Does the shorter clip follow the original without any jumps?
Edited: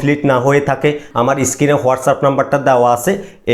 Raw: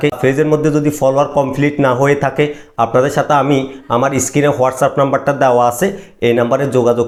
no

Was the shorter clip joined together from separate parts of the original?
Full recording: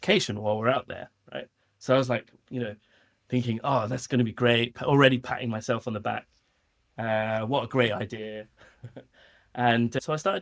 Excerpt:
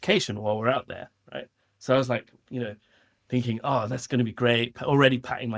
no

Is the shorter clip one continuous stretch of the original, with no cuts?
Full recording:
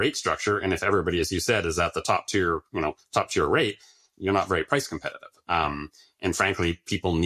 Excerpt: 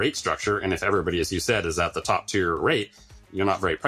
no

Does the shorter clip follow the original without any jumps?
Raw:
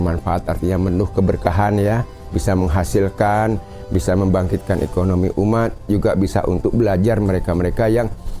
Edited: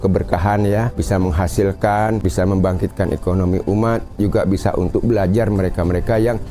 no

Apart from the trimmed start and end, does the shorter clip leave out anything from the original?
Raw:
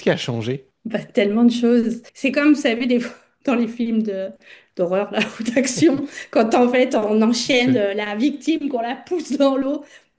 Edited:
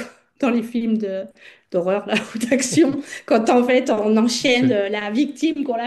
no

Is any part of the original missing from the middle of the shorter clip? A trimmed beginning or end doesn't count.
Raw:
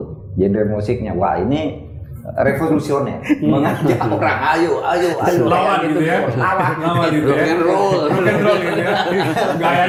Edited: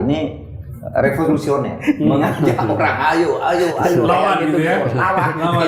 no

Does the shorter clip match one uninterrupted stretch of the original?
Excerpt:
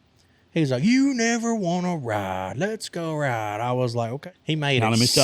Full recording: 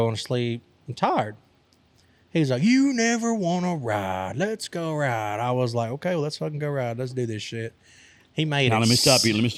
no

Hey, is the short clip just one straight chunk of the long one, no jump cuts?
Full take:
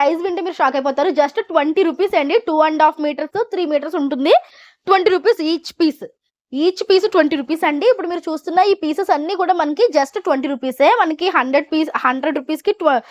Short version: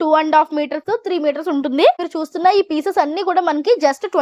no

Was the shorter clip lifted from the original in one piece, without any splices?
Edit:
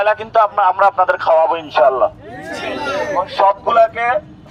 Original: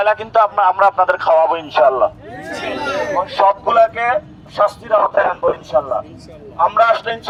yes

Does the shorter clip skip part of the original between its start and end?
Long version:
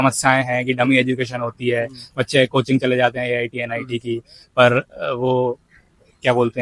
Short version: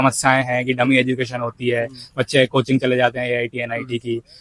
no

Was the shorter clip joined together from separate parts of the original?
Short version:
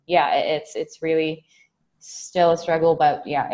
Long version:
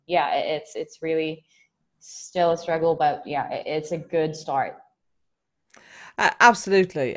no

